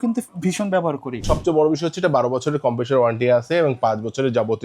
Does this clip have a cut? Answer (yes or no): yes